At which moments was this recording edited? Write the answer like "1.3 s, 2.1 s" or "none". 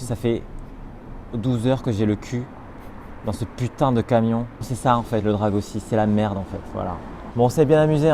4.6 s, 7.2 s